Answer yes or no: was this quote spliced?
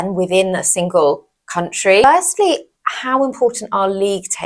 yes